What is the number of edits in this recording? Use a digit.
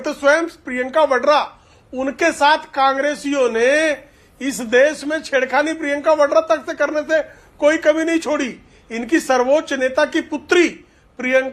0